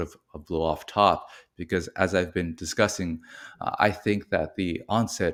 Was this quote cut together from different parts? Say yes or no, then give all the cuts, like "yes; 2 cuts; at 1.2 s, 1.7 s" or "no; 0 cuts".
no; 0 cuts